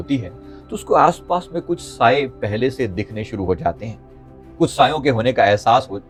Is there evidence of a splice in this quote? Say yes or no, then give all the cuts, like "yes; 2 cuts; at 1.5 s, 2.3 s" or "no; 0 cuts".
no; 0 cuts